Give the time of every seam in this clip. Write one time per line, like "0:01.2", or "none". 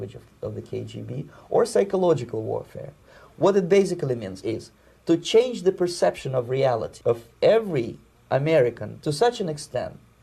0:06.9
0:08.9